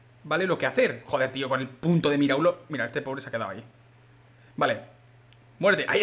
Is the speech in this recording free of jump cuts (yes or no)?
yes